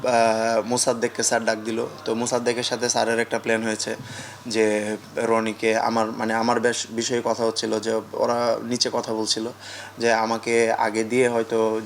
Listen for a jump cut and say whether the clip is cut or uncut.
uncut